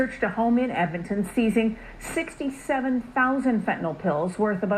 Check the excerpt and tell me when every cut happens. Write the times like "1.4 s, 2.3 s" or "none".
none